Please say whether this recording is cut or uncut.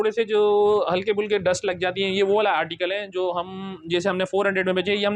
uncut